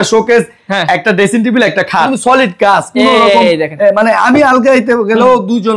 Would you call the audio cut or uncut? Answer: cut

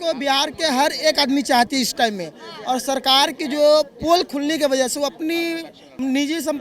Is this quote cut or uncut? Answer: uncut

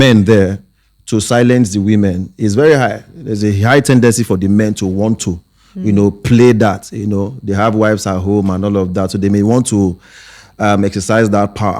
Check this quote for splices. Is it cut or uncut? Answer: uncut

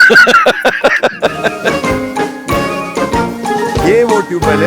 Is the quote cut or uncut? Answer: uncut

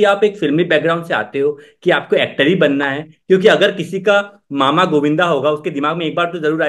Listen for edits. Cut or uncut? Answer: uncut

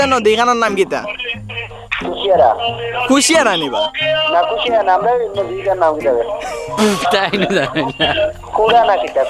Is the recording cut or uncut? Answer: uncut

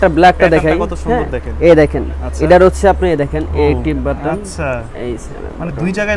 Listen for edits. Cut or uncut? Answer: uncut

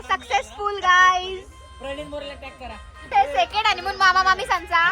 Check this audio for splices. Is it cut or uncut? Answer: cut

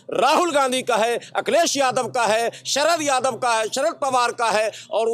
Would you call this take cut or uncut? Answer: uncut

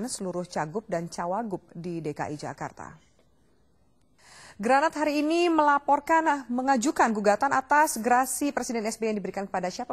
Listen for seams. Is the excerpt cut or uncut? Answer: uncut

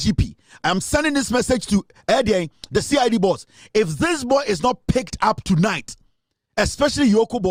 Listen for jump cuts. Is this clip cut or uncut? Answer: uncut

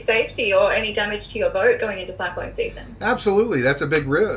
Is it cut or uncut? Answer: uncut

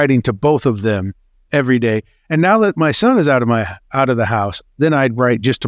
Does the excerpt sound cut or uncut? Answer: uncut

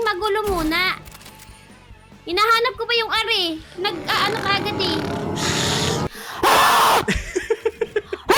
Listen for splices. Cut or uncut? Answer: uncut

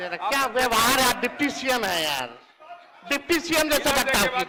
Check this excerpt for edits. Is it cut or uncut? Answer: uncut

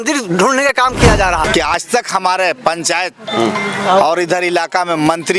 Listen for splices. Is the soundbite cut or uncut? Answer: cut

